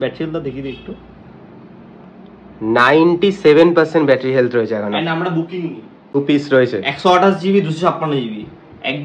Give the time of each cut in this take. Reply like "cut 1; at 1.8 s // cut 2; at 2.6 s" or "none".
cut 1; at 6.2 s

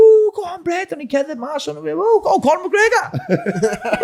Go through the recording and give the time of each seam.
none

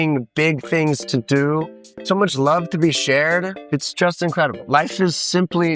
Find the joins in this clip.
cut 1; at 1.9 s // cut 2; at 3.6 s

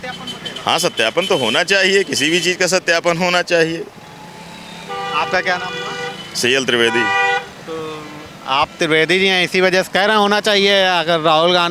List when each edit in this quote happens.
none

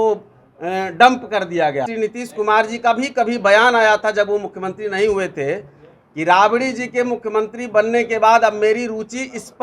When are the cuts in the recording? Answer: cut 1; at 1.9 s

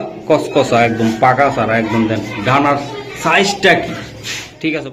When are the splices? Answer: none

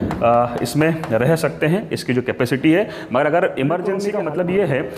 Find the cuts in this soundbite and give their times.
cut 1; at 4.1 s

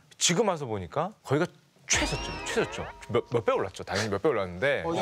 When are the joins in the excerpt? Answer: none

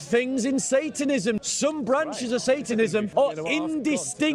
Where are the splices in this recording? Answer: cut 1; at 1.4 s // cut 2; at 3.1 s

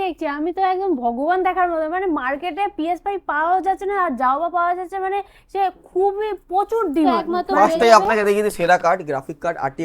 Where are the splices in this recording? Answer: cut 1; at 7.2 s

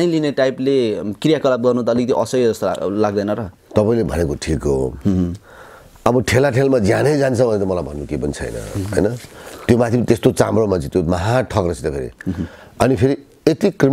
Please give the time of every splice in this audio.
none

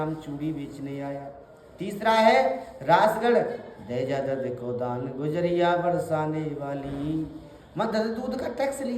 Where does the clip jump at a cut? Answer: none

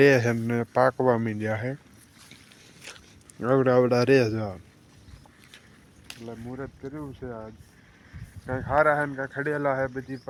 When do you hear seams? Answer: none

